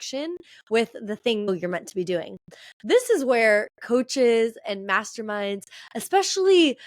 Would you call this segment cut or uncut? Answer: cut